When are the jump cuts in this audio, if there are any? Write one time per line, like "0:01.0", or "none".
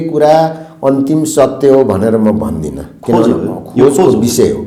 none